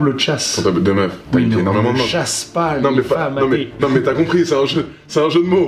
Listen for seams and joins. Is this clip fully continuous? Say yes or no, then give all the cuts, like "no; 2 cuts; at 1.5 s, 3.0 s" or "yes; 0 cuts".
yes; 0 cuts